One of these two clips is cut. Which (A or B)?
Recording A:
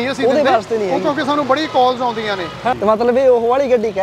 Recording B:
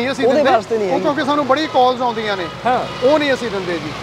A